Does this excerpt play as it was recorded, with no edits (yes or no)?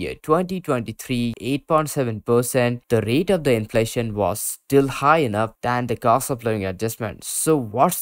no